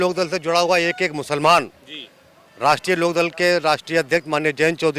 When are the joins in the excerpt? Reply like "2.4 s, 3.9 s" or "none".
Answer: none

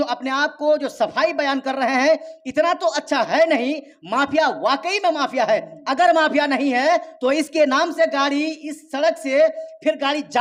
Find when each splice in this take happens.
none

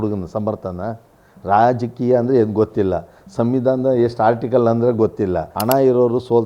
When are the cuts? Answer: 5.5 s

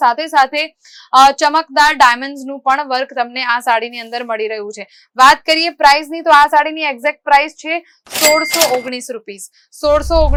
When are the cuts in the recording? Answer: none

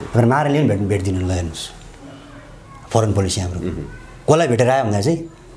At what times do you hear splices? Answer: none

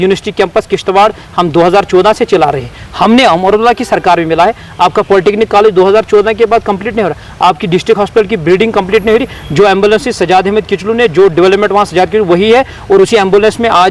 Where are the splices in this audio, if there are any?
none

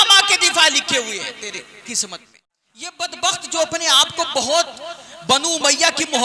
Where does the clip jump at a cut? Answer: 3.1 s

